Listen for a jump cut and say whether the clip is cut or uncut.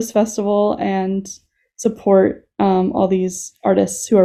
uncut